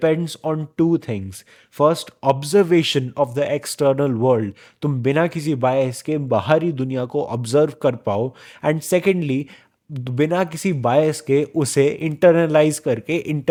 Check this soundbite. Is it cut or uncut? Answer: uncut